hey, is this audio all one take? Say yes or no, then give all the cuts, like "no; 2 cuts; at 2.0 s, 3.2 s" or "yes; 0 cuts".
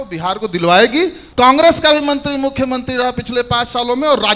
no; 1 cut; at 1.2 s